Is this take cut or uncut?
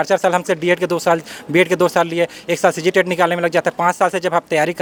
uncut